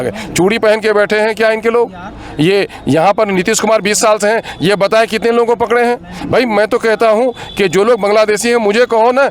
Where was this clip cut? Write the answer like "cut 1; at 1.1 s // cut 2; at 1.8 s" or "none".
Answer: none